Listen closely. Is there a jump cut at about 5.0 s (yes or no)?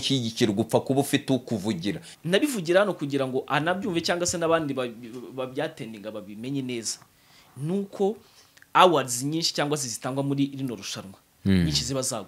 no